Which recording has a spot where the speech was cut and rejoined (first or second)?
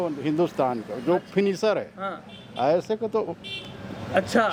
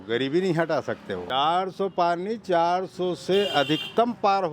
second